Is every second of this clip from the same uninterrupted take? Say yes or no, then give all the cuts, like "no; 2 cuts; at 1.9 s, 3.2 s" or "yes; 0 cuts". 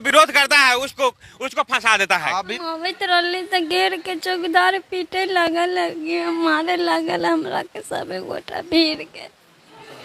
no; 1 cut; at 2.4 s